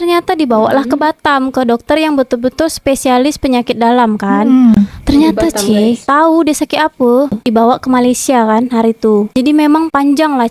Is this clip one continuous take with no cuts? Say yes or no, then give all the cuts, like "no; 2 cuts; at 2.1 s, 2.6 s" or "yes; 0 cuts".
no; 1 cut; at 7.4 s